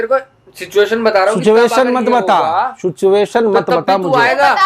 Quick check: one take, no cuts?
yes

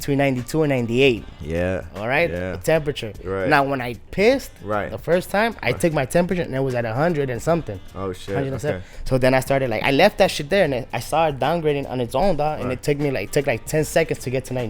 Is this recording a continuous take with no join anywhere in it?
yes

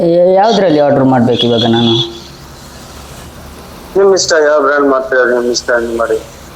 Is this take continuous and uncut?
yes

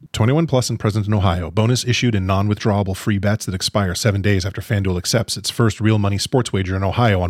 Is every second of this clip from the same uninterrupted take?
yes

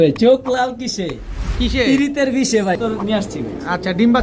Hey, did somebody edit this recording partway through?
yes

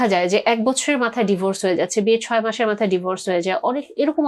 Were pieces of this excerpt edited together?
no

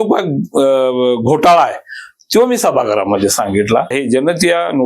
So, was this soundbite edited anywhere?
yes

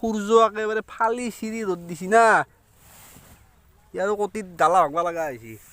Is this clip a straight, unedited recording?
yes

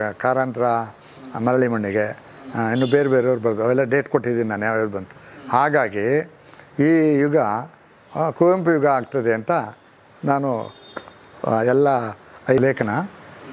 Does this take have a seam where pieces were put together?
yes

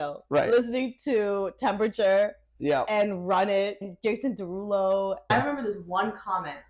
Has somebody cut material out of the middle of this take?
yes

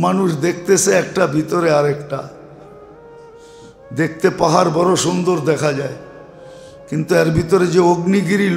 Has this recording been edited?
no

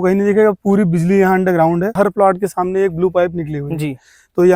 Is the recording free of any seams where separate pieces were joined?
no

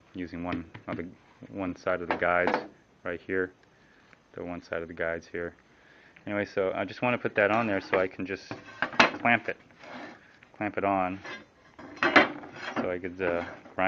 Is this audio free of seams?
yes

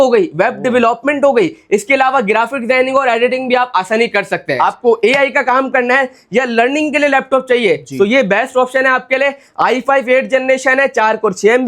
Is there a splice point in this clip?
yes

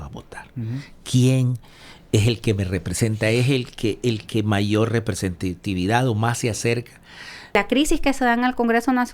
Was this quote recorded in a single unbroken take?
no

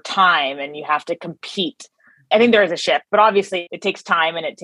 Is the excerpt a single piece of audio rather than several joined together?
no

